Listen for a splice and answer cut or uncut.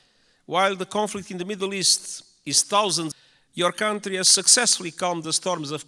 cut